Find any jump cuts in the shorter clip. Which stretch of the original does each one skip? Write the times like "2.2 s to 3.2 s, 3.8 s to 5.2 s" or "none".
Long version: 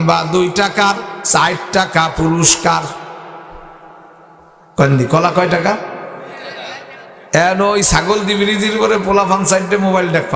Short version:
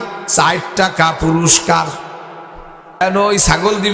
4.0 s to 7.4 s